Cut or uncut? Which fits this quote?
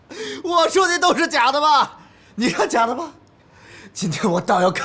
uncut